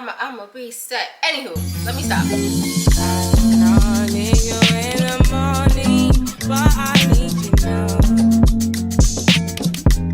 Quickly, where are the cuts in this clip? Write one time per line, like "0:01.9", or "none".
0:01.6